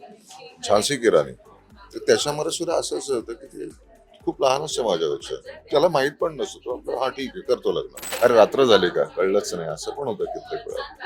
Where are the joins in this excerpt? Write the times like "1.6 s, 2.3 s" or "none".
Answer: 8.0 s